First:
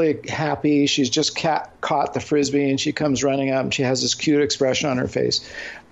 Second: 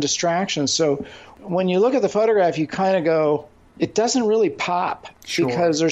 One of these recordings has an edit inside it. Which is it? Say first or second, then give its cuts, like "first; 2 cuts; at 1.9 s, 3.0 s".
second; 2 cuts; at 1.3 s, 3.6 s